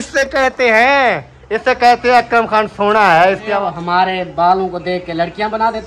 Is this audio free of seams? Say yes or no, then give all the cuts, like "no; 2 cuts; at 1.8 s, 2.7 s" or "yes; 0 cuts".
no; 1 cut; at 3.5 s